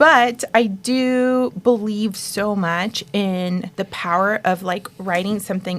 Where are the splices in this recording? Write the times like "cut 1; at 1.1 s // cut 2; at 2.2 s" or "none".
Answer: cut 1; at 3.7 s